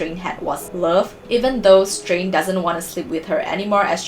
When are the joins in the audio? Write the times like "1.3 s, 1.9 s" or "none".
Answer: 1.0 s